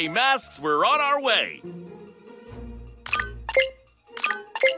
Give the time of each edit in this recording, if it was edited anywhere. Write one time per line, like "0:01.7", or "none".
none